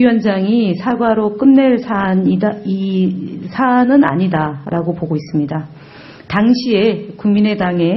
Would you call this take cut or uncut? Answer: uncut